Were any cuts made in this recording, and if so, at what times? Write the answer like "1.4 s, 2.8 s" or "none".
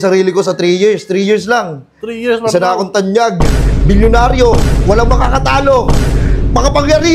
none